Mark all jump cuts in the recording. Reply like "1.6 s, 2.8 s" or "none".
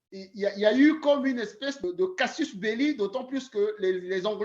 1.8 s